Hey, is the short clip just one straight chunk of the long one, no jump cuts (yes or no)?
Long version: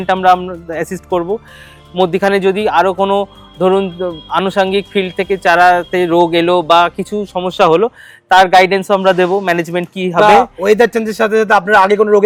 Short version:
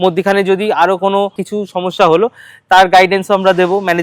no